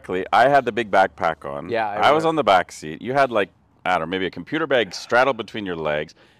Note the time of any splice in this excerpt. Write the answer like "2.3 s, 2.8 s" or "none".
none